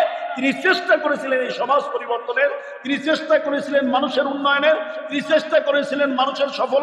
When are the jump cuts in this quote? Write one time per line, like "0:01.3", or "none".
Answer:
none